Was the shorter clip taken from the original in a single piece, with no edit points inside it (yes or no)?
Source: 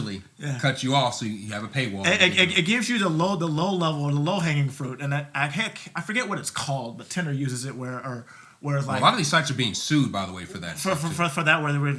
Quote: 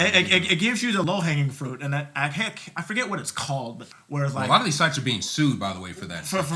no